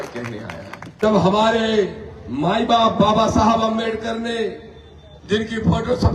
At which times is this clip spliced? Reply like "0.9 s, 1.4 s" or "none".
1.0 s